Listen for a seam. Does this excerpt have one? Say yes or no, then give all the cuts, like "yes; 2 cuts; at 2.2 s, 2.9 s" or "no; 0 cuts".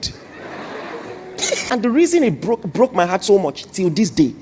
yes; 1 cut; at 1.7 s